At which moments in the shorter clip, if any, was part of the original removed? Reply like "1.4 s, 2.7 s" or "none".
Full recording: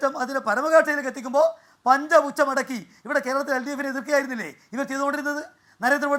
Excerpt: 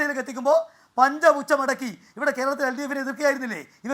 none